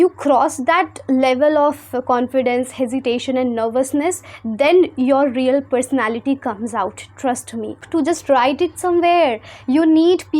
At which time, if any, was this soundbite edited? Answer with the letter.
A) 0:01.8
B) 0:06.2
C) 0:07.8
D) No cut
C